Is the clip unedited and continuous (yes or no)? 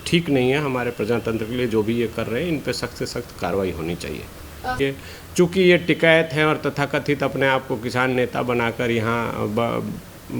no